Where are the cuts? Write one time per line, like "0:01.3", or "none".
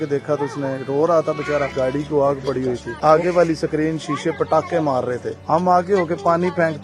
0:01.7
0:02.9
0:05.3